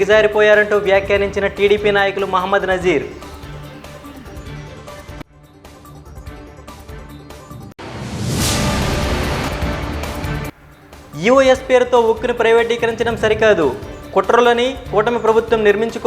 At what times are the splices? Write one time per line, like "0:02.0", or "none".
0:03.1
0:07.6